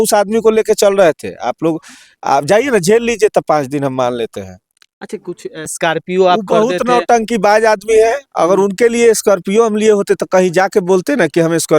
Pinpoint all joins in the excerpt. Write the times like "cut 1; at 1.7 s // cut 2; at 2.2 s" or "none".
cut 1; at 5.7 s